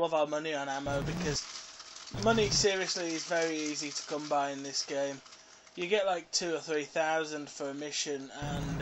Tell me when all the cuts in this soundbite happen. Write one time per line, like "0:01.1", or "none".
none